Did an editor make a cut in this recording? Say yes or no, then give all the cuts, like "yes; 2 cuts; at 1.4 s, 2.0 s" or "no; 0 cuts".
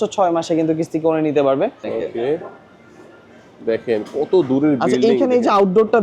yes; 1 cut; at 1.9 s